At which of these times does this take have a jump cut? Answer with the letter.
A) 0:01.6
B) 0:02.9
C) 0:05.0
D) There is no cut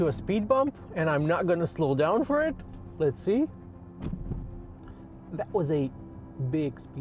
D